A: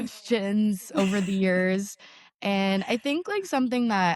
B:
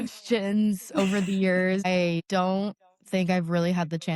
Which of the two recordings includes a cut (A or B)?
B